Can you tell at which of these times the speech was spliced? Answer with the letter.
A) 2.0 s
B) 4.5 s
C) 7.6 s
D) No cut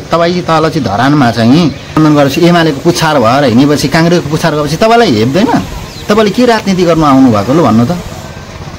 A